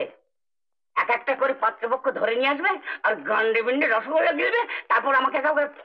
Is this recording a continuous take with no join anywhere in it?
yes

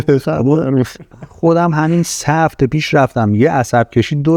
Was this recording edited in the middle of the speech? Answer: no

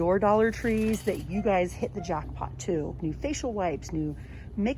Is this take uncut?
no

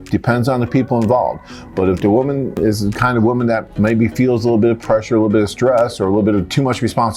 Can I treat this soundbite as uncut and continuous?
no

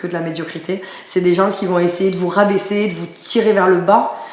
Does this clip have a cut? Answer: no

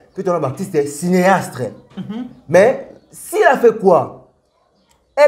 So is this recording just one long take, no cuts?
yes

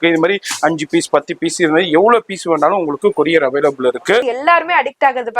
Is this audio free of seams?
no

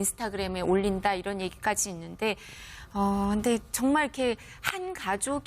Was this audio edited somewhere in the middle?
no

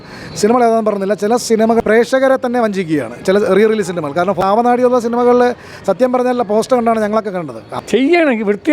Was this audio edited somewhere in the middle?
yes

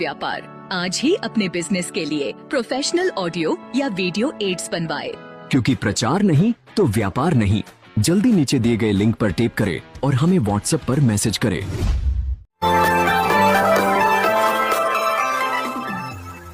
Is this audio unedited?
yes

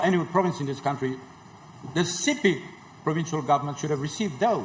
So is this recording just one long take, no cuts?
yes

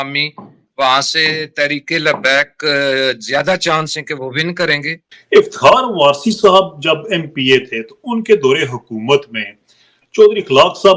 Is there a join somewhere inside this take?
no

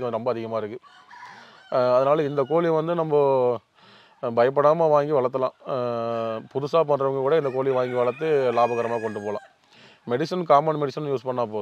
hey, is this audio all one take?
yes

